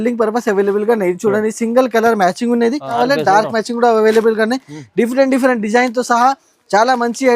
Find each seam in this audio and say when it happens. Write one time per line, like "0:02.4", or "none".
0:02.9